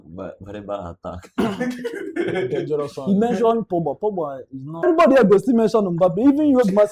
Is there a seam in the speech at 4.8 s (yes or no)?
yes